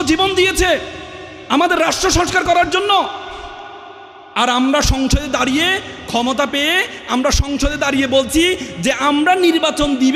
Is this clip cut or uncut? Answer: uncut